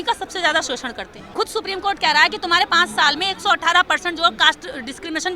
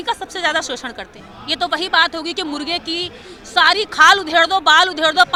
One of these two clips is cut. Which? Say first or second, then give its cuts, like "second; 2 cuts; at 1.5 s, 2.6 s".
first; 1 cut; at 1.3 s